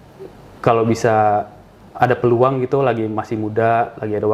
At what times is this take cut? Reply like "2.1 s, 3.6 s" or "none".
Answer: none